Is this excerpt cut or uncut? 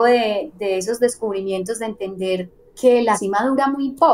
cut